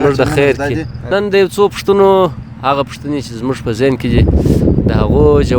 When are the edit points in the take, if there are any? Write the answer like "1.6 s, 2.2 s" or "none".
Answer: 0.9 s

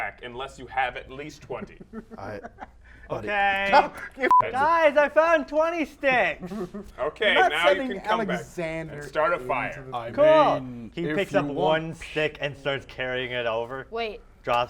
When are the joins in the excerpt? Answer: 4.3 s

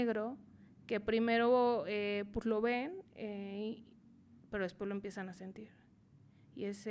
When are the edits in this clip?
none

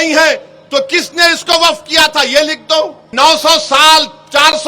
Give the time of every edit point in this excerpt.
3.0 s

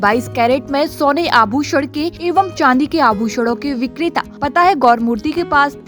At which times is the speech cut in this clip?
2.1 s, 4.3 s

